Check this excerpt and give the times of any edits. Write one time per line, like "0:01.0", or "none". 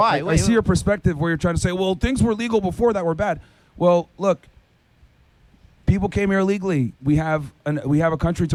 none

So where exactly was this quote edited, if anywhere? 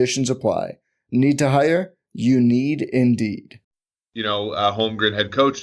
0:03.9

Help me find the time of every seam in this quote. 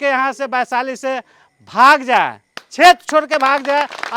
none

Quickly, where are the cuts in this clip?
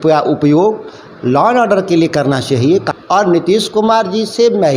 0:02.9

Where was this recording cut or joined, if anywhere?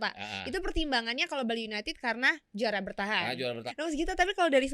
0:03.7

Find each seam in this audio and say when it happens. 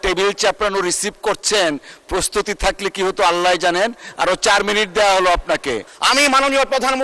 0:05.9

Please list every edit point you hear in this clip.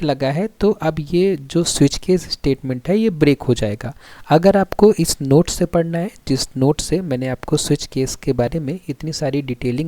0:04.1

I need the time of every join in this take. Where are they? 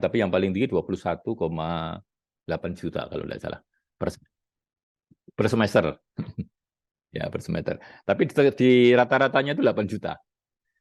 none

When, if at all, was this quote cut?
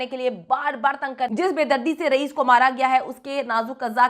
0:01.3

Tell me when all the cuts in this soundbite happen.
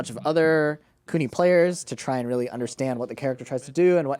none

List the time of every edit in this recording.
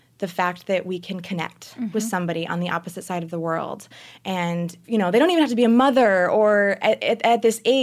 0:04.8

